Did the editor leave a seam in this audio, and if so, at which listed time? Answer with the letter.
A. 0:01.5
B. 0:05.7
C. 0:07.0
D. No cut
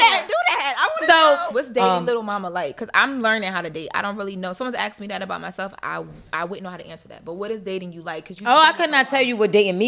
A